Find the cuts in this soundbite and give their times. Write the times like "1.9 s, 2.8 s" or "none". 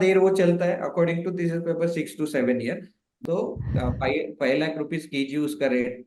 3.2 s